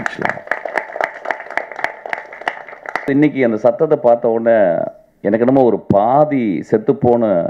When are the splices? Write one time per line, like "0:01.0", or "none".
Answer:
0:03.1